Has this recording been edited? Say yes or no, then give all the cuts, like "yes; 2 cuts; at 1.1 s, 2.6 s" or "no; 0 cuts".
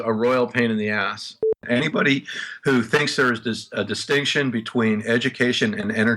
yes; 1 cut; at 1.5 s